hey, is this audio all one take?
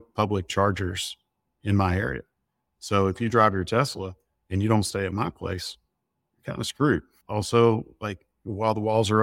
no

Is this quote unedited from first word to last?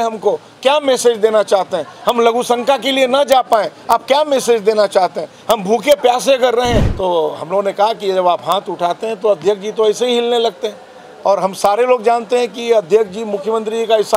no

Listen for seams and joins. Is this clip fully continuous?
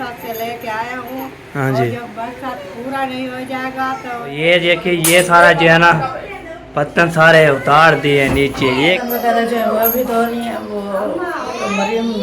no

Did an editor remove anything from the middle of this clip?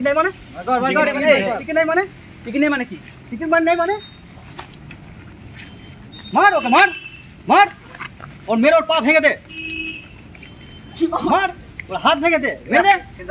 no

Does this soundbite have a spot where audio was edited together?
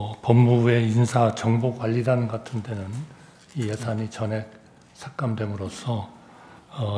no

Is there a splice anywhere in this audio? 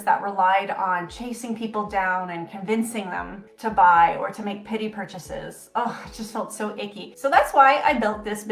no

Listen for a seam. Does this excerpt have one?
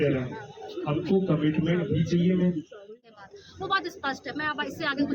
yes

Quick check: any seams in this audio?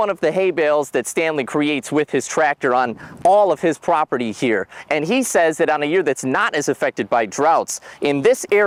no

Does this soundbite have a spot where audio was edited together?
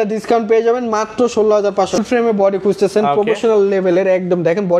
yes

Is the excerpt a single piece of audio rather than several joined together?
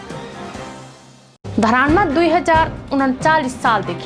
no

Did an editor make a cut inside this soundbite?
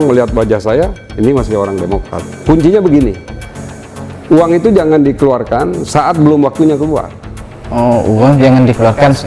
yes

